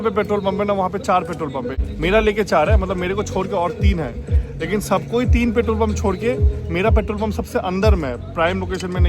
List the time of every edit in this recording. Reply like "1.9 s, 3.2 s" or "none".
1.8 s